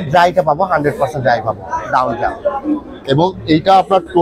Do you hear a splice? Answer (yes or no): no